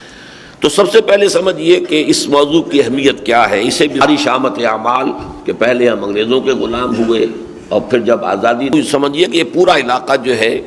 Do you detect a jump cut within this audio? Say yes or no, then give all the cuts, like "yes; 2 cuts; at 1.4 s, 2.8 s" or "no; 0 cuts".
yes; 2 cuts; at 4.0 s, 8.7 s